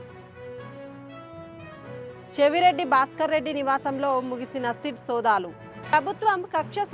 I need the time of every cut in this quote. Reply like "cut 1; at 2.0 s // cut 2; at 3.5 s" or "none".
none